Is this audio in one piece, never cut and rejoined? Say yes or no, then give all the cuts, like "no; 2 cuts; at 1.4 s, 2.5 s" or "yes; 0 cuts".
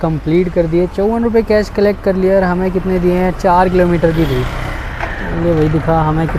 yes; 0 cuts